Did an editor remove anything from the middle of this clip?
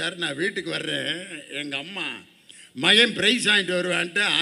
no; 0 cuts

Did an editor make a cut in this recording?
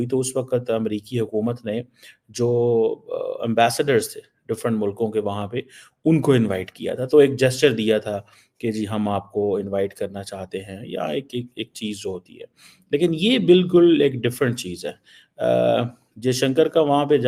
no; 0 cuts

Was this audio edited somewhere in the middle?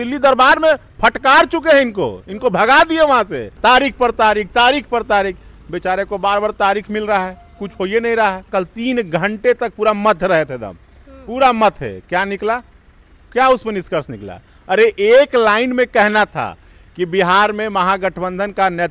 yes; 2 cuts; at 3.5 s, 8.5 s

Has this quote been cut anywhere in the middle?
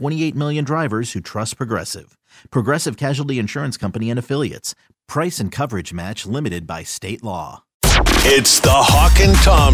yes; 1 cut; at 7.7 s

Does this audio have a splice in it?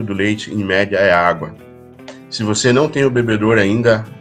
no; 0 cuts

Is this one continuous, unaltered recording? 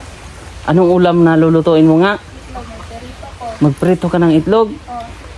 yes; 0 cuts

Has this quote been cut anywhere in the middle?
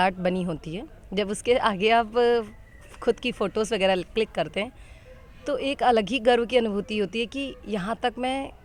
no; 0 cuts

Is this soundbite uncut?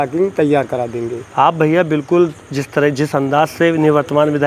yes; 0 cuts

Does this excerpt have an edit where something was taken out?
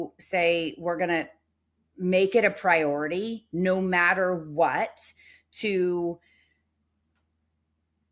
no; 0 cuts

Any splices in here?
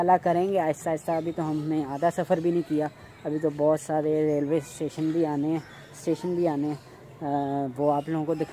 no; 0 cuts

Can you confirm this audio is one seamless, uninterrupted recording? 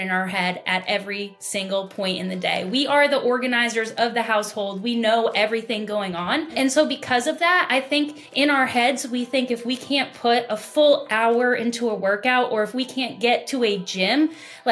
no; 2 cuts; at 6.5 s, 8.2 s

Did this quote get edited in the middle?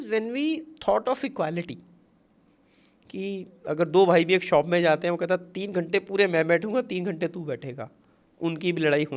no; 0 cuts

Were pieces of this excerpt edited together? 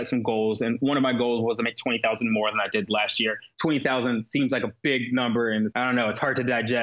yes; 2 cuts; at 3.5 s, 5.7 s

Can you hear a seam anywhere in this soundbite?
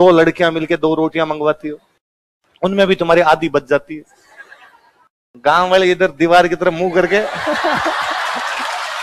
no; 0 cuts

